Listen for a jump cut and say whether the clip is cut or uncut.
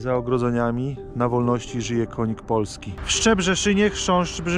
cut